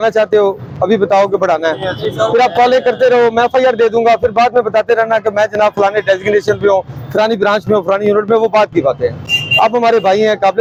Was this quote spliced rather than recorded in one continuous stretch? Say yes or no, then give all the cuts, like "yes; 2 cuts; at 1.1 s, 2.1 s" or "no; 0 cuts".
no; 0 cuts